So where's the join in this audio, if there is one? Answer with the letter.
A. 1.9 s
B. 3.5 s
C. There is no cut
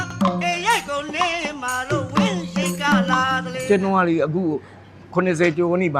B